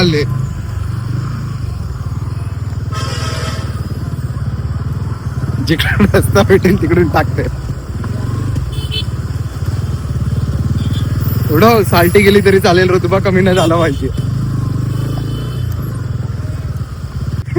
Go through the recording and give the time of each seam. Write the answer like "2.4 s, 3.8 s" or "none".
none